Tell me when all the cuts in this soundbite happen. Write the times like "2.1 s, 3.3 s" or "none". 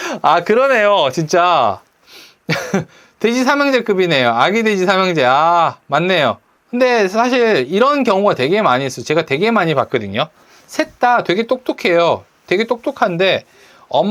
none